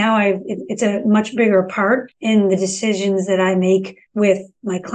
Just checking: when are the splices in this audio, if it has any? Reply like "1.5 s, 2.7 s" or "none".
2.1 s, 4.0 s